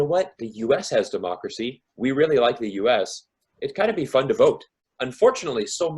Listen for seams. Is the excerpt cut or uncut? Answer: cut